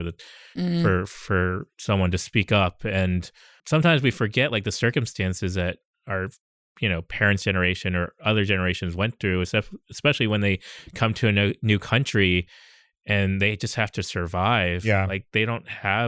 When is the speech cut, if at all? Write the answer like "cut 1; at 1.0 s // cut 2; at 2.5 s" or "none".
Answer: cut 1; at 2.2 s // cut 2; at 3.6 s